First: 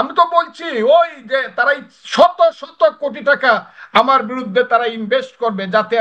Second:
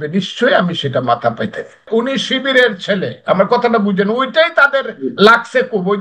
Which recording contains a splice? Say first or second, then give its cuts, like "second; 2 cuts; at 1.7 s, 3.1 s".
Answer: second; 1 cut; at 1.9 s